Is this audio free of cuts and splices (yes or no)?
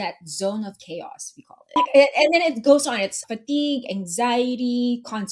no